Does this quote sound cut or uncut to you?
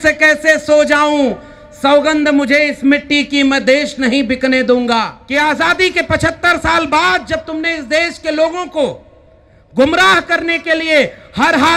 cut